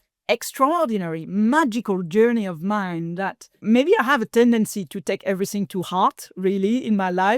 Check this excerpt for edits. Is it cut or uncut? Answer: cut